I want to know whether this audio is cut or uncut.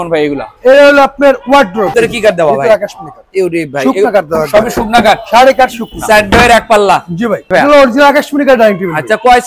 cut